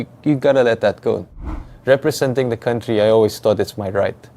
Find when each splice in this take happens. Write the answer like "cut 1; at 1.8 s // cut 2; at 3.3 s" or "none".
cut 1; at 1.3 s